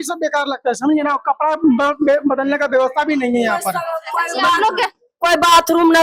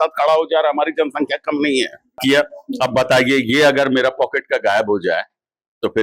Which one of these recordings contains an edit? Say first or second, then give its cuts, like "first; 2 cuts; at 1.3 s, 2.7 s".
second; 1 cut; at 2.2 s